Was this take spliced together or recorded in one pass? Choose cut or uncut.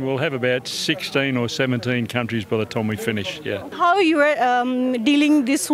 cut